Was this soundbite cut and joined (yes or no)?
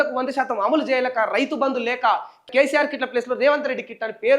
yes